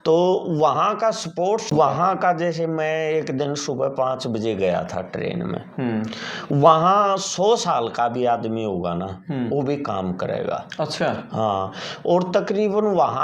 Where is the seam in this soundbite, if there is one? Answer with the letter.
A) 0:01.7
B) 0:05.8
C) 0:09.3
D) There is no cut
A